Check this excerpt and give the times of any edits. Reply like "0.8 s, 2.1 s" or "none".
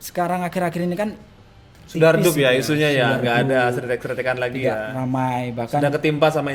none